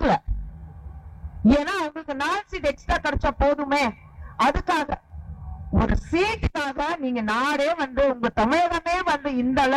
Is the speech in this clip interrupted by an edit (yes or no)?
no